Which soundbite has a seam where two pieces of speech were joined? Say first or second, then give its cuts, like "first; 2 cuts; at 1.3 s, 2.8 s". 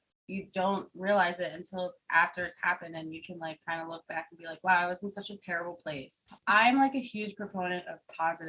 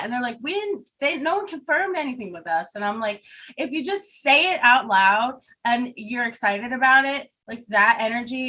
first; 1 cut; at 6.4 s